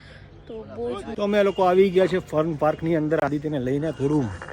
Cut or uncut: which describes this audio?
cut